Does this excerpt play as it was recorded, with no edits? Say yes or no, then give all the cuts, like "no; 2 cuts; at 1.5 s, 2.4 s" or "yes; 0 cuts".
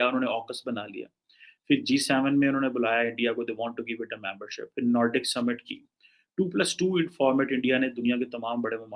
yes; 0 cuts